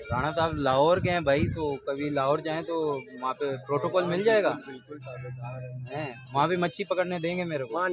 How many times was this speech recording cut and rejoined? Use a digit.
0